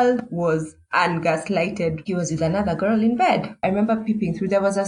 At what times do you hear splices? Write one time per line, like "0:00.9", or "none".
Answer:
0:02.0
0:03.5